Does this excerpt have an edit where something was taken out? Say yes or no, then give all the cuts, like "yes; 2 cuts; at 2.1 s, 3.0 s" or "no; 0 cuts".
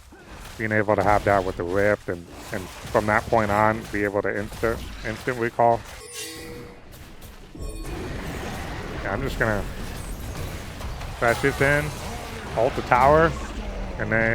yes; 1 cut; at 6.0 s